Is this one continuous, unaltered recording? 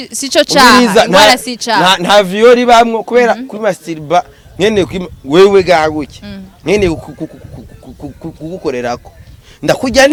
yes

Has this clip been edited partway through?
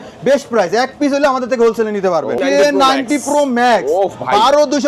yes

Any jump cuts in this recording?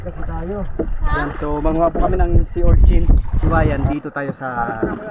yes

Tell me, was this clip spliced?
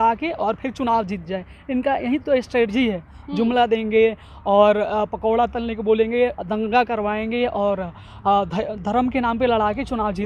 no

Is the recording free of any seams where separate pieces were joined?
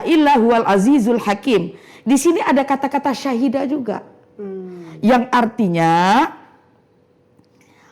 yes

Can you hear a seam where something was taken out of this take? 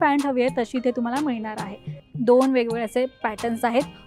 yes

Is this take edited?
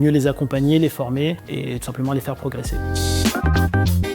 yes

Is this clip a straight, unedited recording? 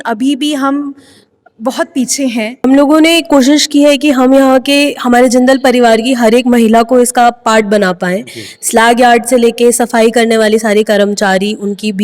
no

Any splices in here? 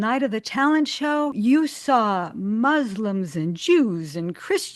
yes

